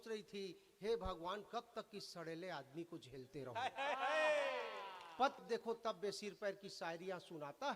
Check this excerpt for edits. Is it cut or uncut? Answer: cut